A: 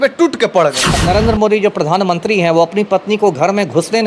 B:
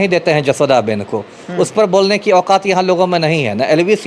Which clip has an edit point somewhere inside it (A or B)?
A